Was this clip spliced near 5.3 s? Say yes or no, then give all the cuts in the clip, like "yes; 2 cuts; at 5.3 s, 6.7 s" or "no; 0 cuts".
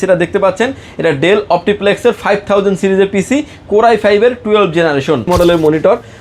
yes; 1 cut; at 5.3 s